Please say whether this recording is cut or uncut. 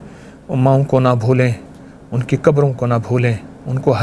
uncut